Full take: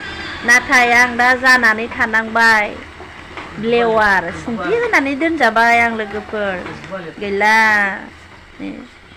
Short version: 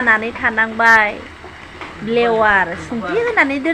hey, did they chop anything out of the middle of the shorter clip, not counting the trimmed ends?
no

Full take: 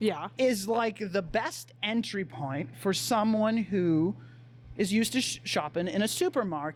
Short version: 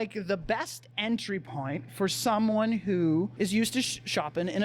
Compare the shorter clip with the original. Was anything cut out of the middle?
yes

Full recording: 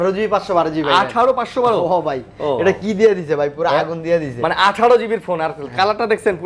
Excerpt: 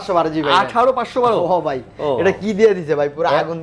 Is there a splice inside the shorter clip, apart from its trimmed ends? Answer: no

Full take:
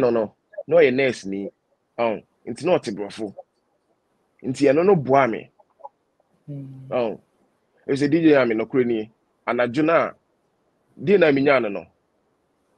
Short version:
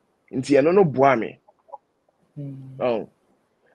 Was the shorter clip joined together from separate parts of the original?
no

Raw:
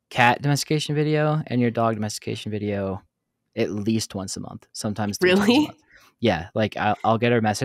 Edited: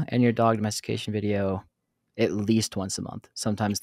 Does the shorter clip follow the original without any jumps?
yes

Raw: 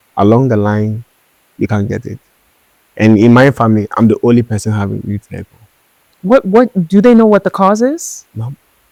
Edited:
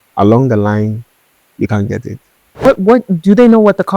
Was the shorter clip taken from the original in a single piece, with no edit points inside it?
no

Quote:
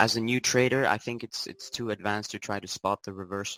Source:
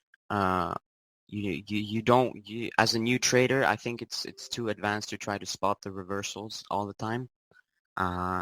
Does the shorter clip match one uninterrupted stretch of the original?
yes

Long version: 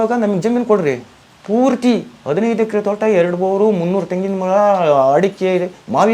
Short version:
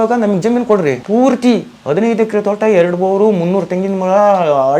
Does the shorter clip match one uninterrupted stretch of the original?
no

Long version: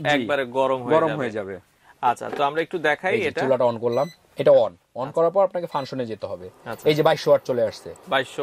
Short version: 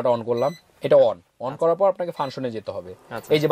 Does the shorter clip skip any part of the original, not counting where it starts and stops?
no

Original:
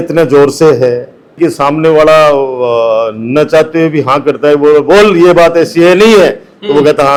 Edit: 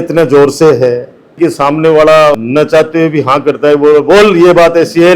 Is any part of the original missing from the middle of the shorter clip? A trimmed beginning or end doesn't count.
yes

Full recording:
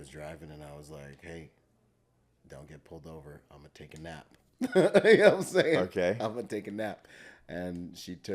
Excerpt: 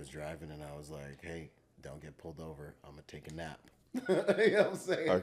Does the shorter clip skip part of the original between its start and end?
yes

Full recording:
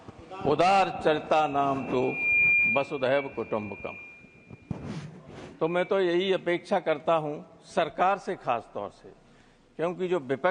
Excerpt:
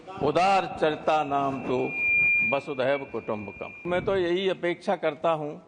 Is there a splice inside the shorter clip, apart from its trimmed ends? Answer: yes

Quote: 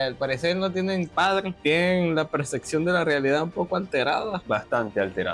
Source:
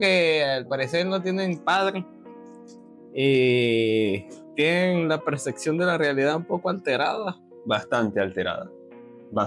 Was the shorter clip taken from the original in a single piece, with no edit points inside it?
no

